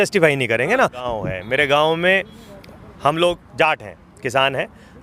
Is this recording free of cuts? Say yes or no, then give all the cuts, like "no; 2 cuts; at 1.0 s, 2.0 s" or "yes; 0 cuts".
no; 1 cut; at 1.0 s